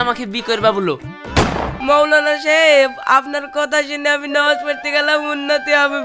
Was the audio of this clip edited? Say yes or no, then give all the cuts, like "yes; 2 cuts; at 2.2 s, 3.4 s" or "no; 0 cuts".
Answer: yes; 1 cut; at 1.7 s